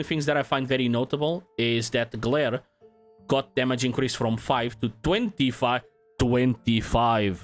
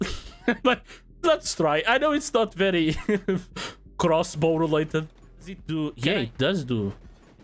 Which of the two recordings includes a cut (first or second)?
second